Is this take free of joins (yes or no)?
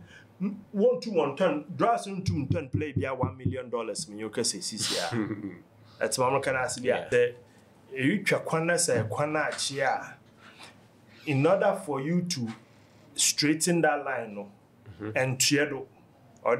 no